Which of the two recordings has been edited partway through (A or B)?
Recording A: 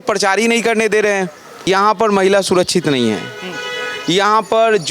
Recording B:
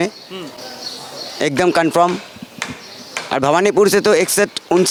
A